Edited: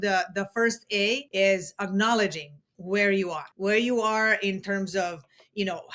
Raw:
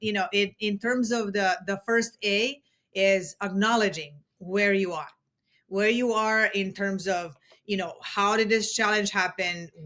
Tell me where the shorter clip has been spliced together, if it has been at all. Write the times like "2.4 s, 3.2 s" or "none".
1.3 s, 3.4 s